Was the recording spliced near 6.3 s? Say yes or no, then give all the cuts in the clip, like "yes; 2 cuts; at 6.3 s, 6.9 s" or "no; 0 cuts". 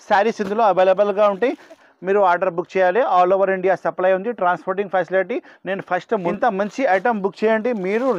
yes; 2 cuts; at 1.9 s, 6.3 s